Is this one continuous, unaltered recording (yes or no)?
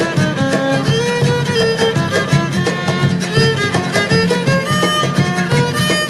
yes